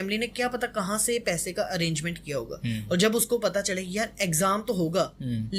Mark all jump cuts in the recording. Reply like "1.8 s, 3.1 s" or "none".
none